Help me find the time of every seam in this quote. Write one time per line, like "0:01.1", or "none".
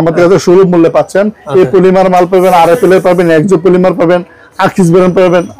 none